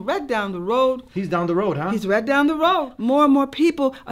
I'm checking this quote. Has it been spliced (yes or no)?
yes